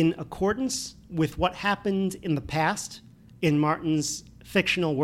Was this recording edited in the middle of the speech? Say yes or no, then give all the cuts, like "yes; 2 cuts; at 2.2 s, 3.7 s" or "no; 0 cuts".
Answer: no; 0 cuts